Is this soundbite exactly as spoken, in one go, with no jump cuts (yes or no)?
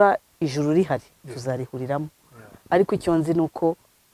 yes